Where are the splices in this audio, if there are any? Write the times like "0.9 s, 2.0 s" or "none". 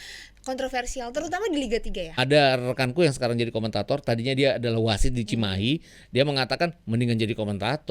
2.2 s